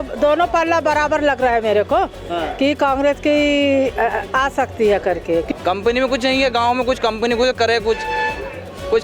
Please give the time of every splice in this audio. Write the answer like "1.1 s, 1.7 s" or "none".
5.5 s

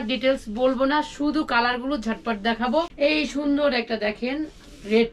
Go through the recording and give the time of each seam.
2.9 s

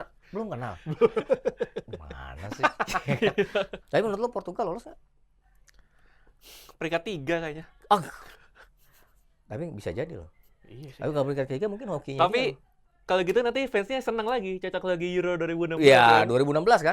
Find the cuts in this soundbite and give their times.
3.8 s

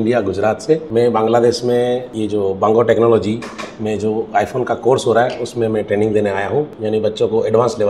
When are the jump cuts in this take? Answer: 0.9 s, 2.1 s, 6.8 s

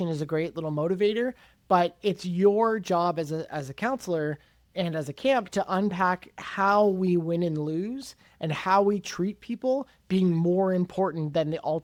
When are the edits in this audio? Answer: none

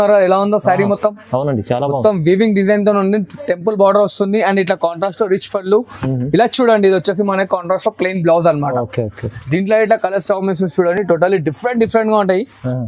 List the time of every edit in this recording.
none

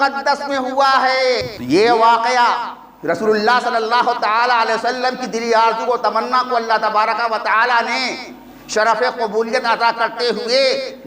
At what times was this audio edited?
1.4 s

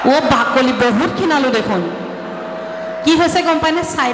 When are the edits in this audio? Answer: none

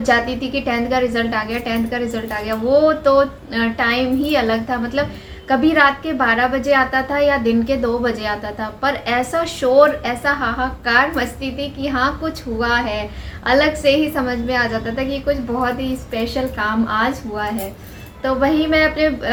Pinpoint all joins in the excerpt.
none

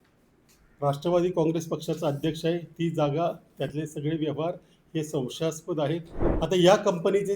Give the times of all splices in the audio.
6.2 s

